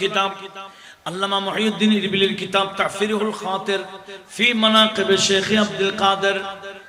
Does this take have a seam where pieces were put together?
no; 0 cuts

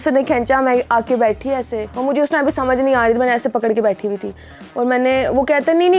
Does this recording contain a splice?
no; 0 cuts

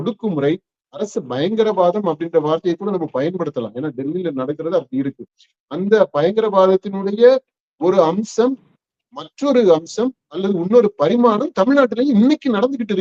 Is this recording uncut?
yes; 0 cuts

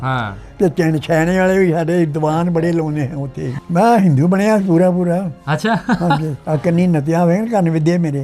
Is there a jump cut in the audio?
yes; 1 cut; at 3.5 s

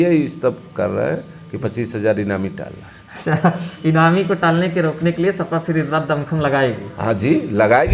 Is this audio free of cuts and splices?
yes; 0 cuts

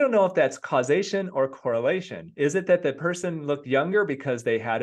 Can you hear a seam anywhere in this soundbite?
no; 0 cuts

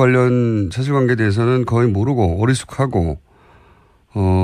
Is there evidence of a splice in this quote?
yes; 1 cut; at 2.3 s

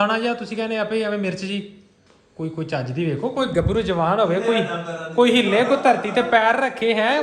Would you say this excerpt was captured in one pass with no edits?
yes; 0 cuts

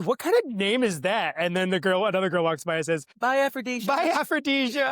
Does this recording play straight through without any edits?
no; 1 cut; at 3.1 s

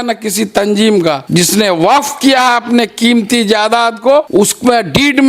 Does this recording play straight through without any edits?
no; 2 cuts; at 1.2 s, 4.3 s

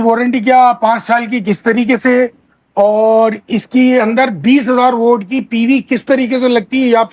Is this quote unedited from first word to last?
yes; 0 cuts

